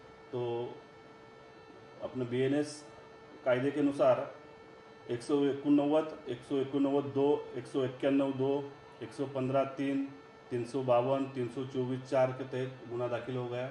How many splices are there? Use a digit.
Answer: 0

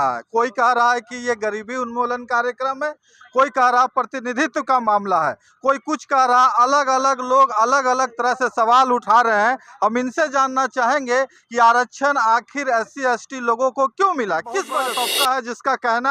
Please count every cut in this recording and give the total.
1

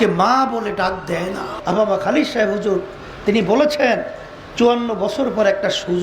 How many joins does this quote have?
1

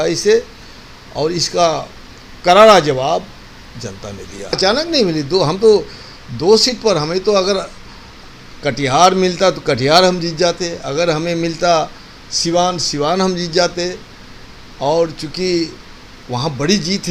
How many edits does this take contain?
1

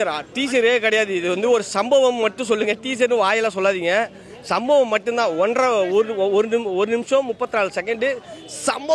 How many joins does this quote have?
0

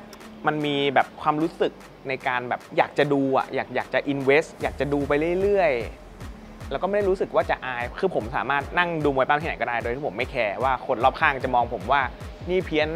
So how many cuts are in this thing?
2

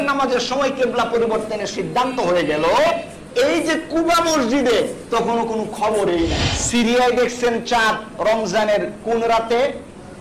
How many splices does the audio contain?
1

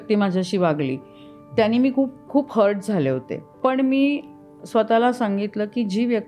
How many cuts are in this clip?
1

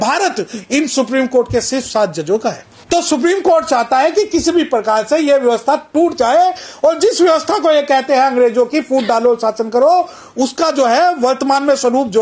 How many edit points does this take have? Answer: 1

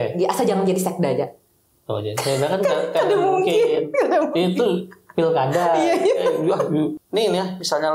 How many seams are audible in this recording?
1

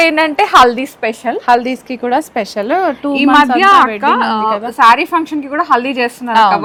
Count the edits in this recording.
0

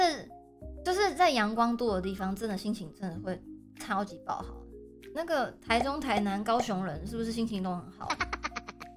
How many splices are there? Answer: 0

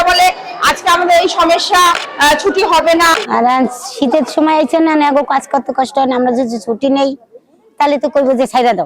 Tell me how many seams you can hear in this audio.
2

